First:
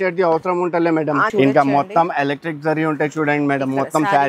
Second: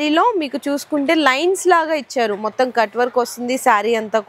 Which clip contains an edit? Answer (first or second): first